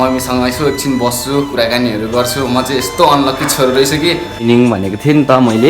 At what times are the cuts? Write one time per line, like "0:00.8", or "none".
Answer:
0:04.4